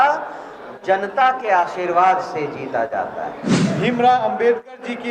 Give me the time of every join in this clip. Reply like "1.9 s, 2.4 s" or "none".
3.4 s